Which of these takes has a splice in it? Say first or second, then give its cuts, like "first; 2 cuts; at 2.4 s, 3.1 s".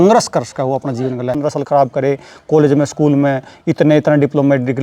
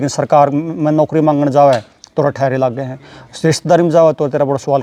first; 1 cut; at 1.3 s